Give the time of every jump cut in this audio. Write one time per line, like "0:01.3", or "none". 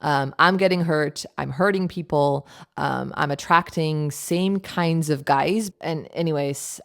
0:05.7